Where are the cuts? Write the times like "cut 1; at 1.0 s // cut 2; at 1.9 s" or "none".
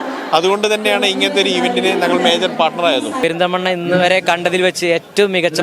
cut 1; at 3.2 s

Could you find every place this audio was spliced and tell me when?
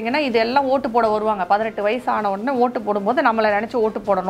none

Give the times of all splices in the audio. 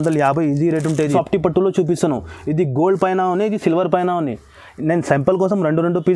cut 1; at 1.1 s

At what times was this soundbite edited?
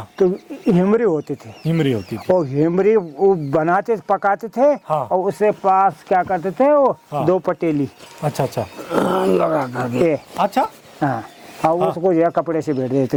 none

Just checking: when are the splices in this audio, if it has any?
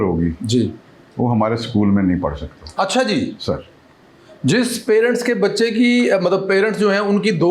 none

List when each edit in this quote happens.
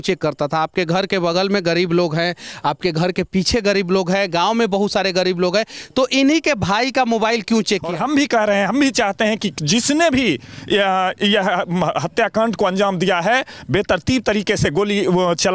cut 1; at 7.9 s

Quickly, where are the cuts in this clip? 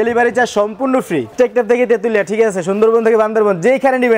cut 1; at 1.3 s

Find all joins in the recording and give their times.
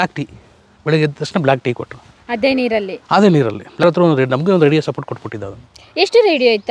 cut 1; at 3.8 s

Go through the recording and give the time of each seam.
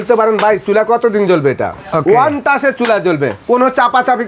none

